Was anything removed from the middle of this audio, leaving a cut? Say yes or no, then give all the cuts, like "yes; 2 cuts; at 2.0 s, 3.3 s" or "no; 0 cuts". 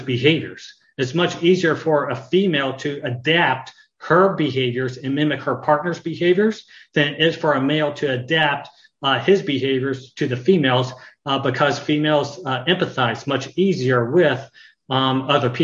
no; 0 cuts